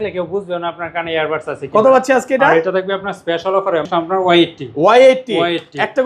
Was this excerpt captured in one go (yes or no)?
no